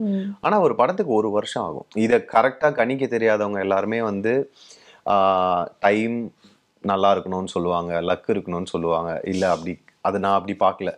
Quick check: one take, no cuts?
no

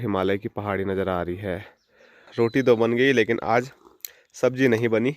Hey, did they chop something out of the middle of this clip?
yes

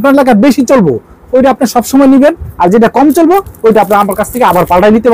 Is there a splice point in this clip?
no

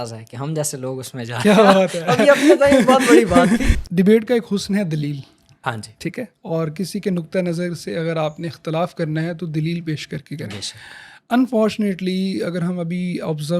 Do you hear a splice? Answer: yes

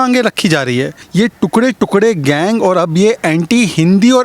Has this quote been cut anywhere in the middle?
yes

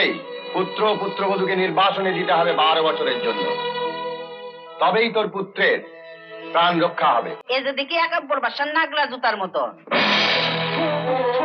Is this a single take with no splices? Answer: no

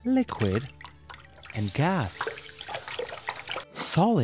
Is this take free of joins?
yes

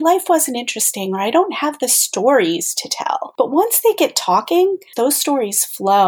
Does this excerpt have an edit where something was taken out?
yes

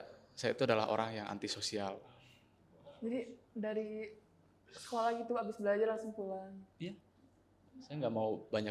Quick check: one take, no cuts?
yes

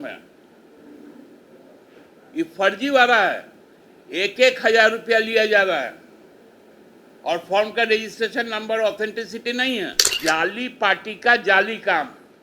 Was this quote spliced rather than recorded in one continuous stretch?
yes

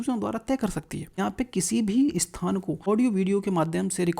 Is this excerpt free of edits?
no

